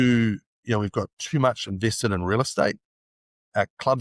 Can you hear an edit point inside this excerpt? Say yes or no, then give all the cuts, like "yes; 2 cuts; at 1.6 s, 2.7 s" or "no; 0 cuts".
no; 0 cuts